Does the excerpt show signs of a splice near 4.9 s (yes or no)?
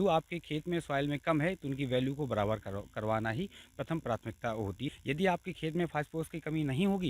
yes